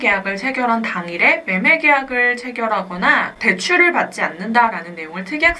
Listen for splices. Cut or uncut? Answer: uncut